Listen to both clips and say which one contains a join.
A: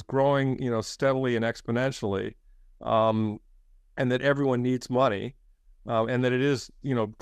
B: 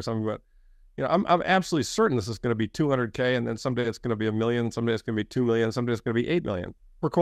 A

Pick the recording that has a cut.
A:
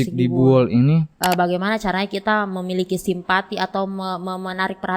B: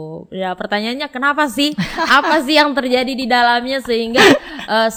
A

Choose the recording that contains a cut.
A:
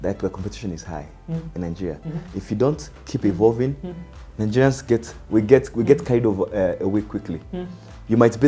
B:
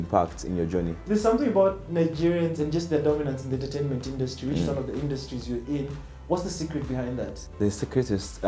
B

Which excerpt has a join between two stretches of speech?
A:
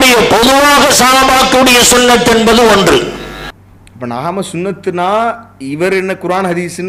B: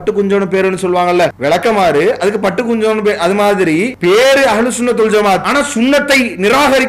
B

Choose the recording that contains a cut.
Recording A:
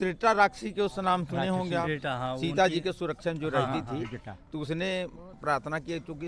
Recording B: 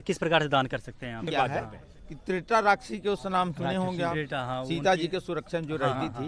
B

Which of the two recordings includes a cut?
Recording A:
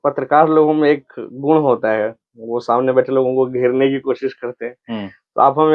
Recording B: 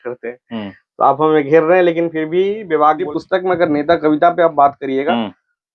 B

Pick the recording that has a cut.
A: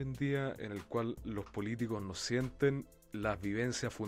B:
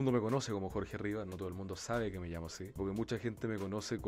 B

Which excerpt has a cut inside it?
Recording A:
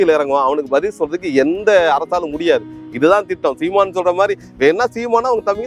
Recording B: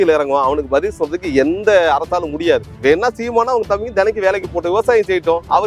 B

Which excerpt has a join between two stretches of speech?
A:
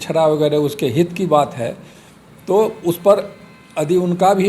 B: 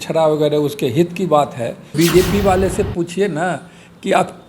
B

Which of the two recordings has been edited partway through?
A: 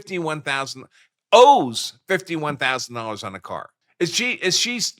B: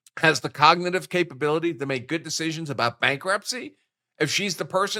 A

